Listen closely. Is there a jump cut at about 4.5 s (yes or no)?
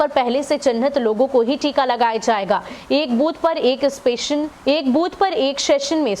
yes